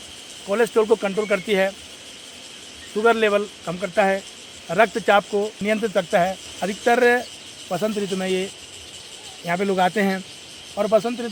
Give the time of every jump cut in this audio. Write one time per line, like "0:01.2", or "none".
none